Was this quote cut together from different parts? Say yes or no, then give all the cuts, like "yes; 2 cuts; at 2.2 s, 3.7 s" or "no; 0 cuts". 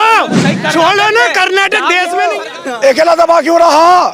yes; 1 cut; at 2.4 s